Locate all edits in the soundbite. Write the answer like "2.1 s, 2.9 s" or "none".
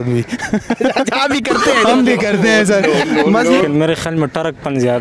3.6 s